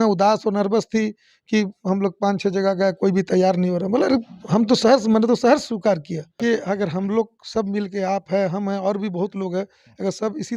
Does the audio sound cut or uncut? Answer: cut